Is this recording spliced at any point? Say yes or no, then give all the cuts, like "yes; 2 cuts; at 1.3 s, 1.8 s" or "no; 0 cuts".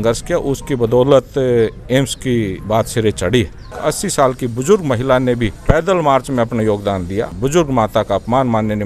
yes; 4 cuts; at 2.6 s, 3.8 s, 5.5 s, 7.3 s